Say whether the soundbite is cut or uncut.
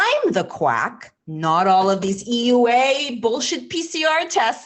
uncut